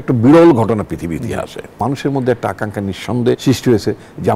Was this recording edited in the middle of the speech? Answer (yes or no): yes